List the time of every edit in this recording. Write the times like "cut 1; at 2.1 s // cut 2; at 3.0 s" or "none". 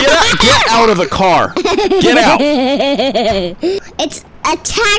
cut 1; at 3.8 s